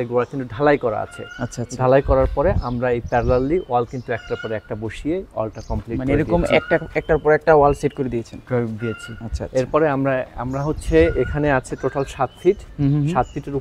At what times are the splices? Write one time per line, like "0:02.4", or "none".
none

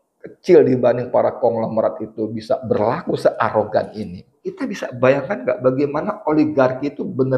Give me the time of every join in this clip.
0:04.4

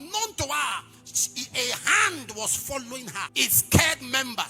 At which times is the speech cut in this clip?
0:03.3

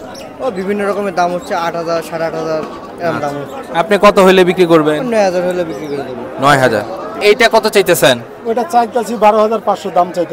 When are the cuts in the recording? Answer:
0:07.2

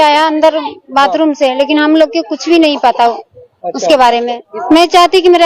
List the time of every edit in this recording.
0:04.5

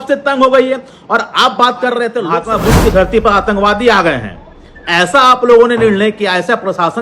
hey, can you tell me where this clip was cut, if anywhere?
0:02.4

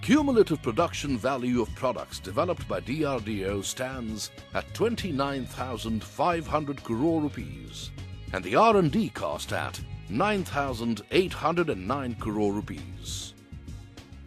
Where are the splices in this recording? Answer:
0:03.8

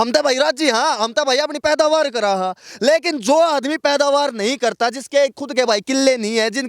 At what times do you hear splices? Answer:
none

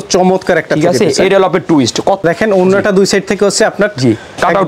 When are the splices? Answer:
0:02.2

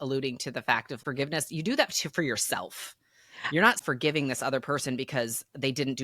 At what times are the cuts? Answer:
0:01.0
0:03.7

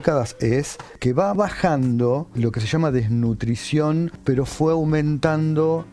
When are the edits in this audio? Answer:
0:01.4
0:02.4
0:04.2

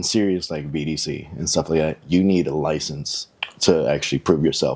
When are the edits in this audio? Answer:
none

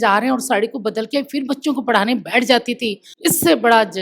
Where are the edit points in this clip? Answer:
0:03.0

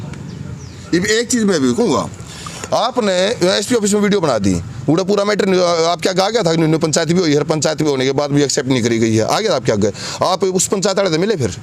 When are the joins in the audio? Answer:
none

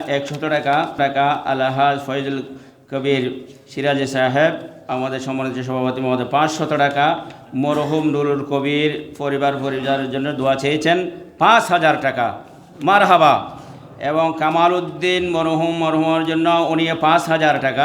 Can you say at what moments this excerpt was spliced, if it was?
0:00.9

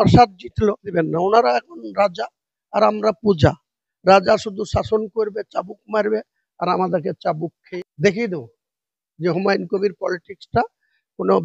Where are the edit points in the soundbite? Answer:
0:00.9
0:07.6

